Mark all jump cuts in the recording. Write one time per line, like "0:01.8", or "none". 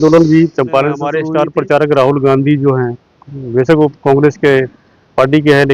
0:01.2